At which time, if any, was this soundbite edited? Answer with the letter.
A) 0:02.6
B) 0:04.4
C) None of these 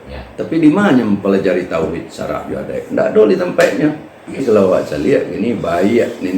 B